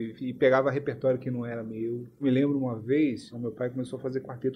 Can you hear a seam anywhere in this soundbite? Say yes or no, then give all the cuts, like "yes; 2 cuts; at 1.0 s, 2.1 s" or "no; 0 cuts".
yes; 2 cuts; at 2.2 s, 3.3 s